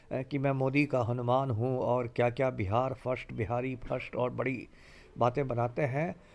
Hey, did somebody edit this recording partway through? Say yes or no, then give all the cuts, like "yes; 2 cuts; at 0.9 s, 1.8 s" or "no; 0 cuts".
no; 0 cuts